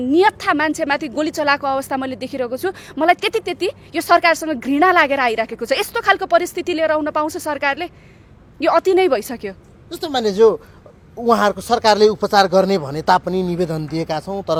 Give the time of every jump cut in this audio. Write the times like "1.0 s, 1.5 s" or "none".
none